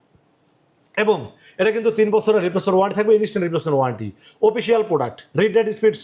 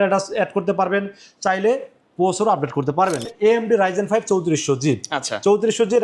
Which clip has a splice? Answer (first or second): second